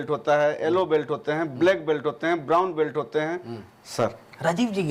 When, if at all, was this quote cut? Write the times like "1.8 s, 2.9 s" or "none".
none